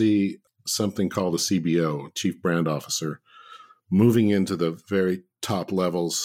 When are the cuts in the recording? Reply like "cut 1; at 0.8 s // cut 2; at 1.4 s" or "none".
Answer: none